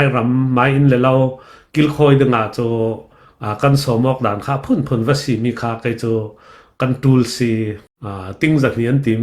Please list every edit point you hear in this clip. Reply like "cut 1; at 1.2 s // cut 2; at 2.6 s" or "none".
cut 1; at 7.8 s